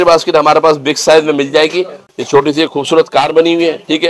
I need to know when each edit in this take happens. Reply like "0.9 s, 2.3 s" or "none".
2.0 s